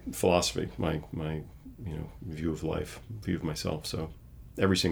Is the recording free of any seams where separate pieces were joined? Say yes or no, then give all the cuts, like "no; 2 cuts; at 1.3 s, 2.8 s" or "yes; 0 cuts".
yes; 0 cuts